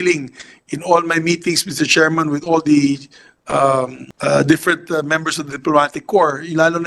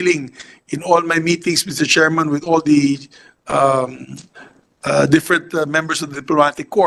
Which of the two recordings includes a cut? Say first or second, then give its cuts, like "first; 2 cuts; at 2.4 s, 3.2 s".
first; 1 cut; at 4.0 s